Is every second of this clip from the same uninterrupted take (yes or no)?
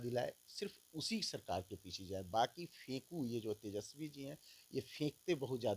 yes